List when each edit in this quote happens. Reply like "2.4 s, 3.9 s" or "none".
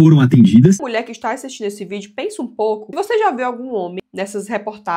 0.8 s, 2.9 s

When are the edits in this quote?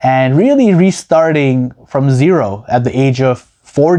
none

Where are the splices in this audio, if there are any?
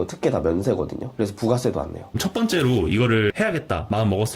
2.0 s, 3.3 s

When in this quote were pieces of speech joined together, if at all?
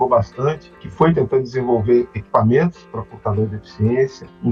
none

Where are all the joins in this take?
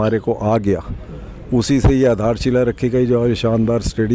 none

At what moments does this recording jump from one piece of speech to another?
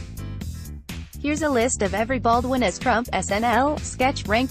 1.1 s

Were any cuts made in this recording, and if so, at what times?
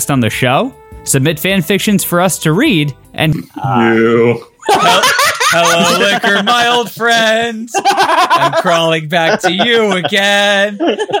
3.3 s

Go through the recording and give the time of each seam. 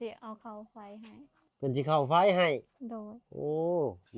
none

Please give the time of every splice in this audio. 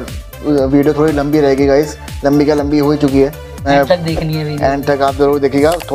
3.7 s

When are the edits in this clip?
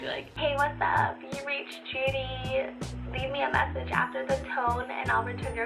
none

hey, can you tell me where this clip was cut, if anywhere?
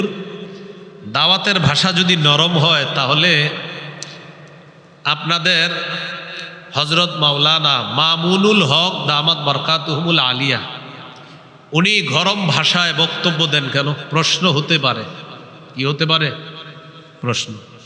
none

